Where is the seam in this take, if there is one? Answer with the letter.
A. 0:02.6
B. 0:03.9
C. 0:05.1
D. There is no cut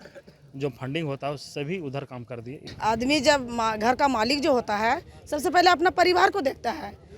A